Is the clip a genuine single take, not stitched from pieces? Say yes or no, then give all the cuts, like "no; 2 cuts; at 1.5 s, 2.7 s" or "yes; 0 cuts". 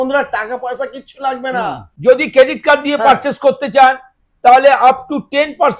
no; 1 cut; at 1.9 s